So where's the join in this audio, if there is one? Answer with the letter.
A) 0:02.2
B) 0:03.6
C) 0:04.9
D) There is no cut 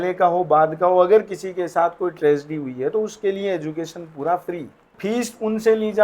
C